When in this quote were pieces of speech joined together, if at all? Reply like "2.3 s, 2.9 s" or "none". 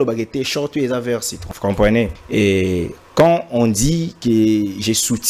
1.4 s, 2.2 s